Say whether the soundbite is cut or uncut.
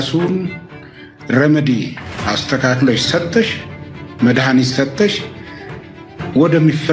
uncut